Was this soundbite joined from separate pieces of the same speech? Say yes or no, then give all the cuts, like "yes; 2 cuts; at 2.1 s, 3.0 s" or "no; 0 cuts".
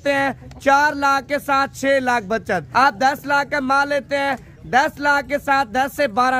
yes; 1 cut; at 2.7 s